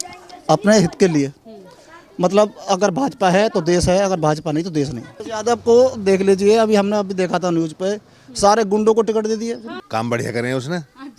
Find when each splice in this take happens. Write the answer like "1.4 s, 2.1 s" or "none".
5.3 s, 9.7 s

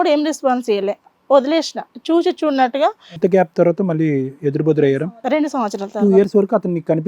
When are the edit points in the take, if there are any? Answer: 5.2 s

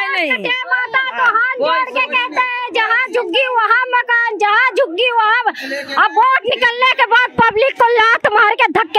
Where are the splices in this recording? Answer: none

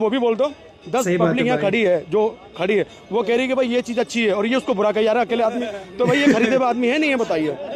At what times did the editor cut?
none

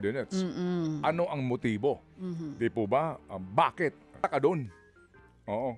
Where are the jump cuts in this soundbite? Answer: 4.2 s

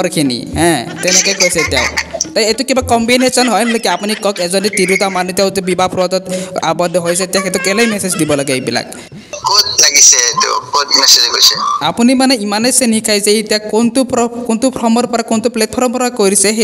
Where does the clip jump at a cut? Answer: 9.2 s

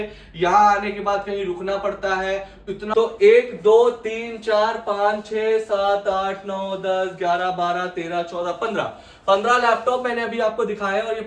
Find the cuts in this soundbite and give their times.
2.8 s

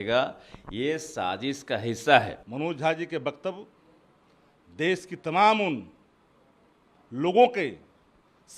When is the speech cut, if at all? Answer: 2.4 s

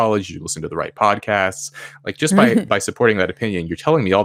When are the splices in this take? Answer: none

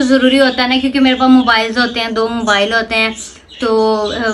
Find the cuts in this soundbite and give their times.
none

